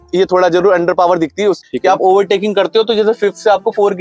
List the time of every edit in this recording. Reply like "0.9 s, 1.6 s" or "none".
1.6 s